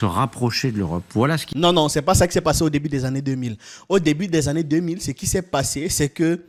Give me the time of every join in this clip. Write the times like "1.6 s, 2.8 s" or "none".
none